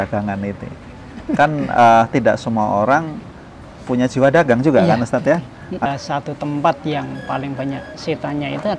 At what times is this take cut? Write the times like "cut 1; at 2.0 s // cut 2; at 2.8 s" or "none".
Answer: cut 1; at 5.9 s

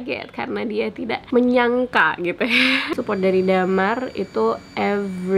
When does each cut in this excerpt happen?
cut 1; at 1.2 s // cut 2; at 3.0 s

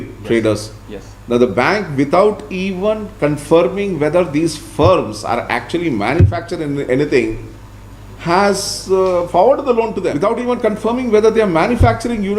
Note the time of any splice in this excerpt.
cut 1; at 10.1 s

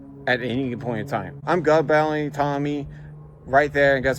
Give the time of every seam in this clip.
cut 1; at 1.3 s

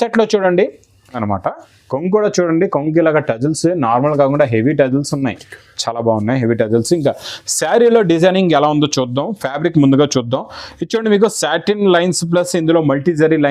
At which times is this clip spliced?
cut 1; at 1.2 s

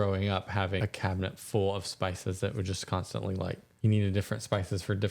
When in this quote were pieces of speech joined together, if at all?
cut 1; at 0.8 s // cut 2; at 3.7 s

